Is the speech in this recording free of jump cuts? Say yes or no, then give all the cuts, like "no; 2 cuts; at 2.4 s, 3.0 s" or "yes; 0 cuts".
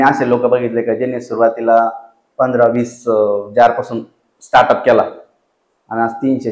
yes; 0 cuts